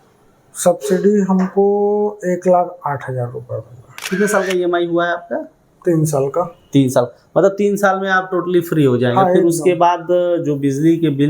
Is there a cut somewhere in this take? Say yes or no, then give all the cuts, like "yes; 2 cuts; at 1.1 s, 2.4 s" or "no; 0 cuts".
yes; 1 cut; at 4.1 s